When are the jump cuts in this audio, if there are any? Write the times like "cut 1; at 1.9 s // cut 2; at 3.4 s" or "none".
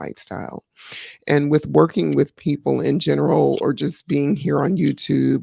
none